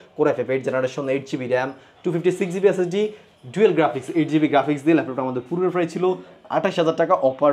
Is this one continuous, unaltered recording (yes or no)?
yes